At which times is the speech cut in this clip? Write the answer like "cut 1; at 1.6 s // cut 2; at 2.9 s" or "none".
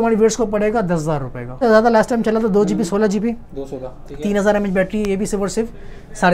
cut 1; at 1.5 s